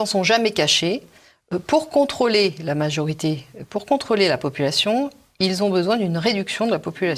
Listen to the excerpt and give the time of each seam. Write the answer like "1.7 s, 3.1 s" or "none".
none